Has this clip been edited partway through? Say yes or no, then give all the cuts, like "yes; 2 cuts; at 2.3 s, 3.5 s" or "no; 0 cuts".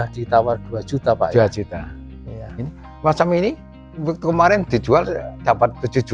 no; 0 cuts